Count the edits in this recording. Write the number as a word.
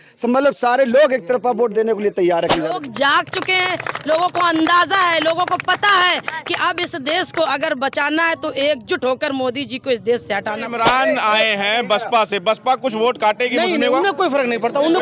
two